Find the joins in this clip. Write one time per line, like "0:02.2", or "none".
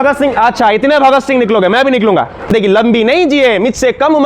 0:02.5